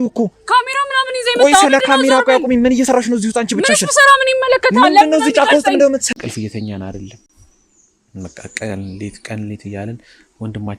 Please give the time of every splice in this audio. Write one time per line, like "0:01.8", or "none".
0:06.1